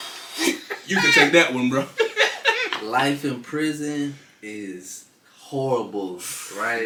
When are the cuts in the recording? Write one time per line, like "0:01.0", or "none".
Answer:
none